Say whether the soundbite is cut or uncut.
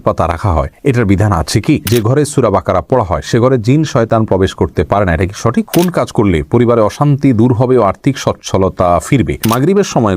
cut